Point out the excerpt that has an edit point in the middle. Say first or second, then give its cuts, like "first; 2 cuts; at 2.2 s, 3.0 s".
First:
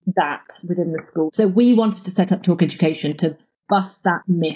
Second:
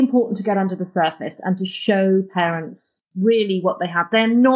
first; 1 cut; at 1.3 s